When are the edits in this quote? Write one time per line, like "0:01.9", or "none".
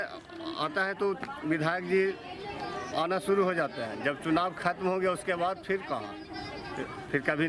none